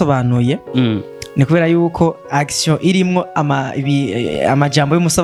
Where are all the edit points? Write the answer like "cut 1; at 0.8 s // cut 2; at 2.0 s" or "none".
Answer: none